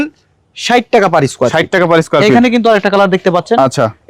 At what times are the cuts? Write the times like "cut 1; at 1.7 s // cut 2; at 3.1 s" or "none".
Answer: none

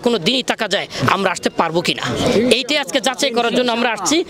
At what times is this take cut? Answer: none

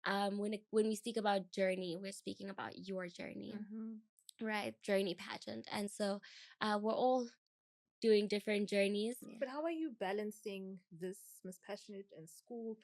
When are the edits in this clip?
cut 1; at 9.2 s

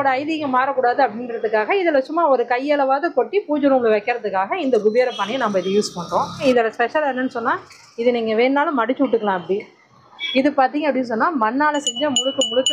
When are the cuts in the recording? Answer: cut 1; at 6.4 s // cut 2; at 10.1 s

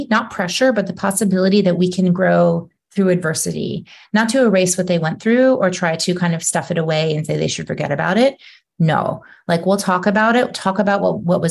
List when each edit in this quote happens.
none

